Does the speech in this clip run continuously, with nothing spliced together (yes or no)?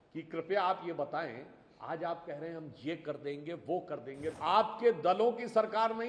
no